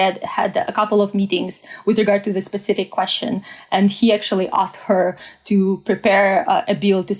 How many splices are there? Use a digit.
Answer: 0